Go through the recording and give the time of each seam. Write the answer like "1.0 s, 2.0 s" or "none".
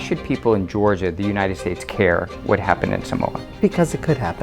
3.4 s

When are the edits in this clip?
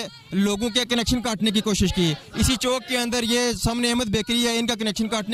none

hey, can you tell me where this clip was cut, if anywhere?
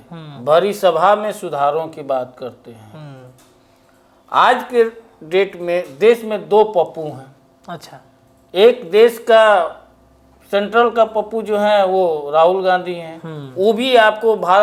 none

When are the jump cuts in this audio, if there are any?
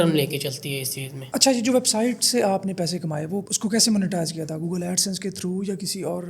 1.1 s

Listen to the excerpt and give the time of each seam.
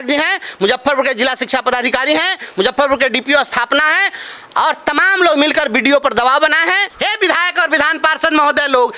6.9 s

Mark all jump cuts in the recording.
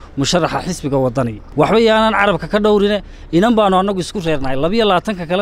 1.4 s

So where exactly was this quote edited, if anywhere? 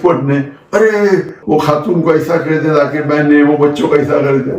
1.4 s

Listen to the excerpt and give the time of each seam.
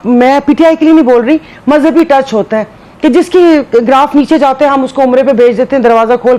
none

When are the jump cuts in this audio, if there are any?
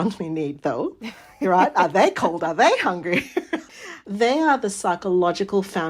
3.7 s

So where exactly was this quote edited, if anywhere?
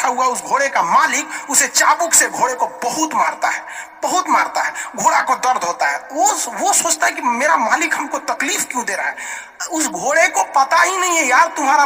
none

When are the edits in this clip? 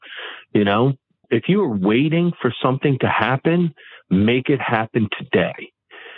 1.2 s

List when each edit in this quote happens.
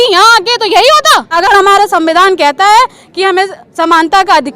1.3 s

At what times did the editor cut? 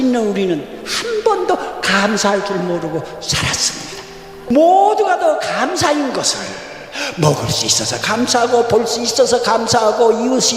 4.5 s

